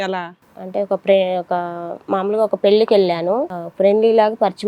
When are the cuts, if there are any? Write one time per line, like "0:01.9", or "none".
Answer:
0:03.6